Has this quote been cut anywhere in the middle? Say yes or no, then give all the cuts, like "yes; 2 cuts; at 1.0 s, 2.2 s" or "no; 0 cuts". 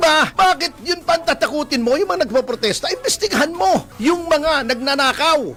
no; 0 cuts